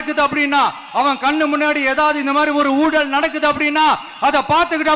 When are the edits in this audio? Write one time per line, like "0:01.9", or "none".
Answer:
none